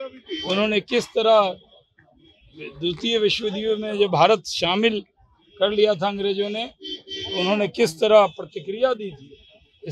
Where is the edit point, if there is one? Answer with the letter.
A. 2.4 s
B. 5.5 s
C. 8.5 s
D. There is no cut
D